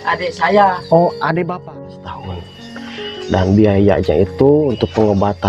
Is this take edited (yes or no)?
yes